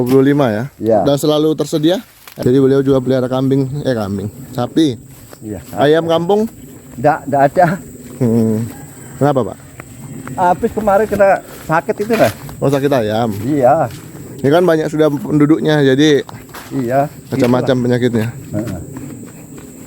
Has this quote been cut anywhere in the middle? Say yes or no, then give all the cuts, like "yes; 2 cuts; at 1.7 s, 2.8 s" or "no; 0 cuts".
yes; 1 cut; at 2.2 s